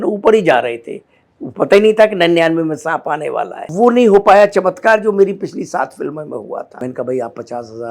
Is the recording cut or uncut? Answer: cut